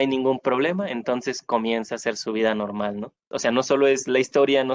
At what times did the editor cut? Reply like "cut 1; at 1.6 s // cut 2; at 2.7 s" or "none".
cut 1; at 3.3 s